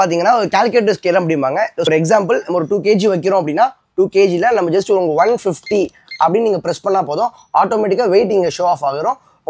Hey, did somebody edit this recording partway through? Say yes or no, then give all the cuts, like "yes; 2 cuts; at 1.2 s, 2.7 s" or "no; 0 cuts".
yes; 1 cut; at 1.9 s